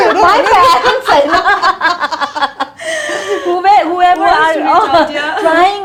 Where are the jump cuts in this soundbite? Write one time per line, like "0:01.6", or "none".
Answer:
none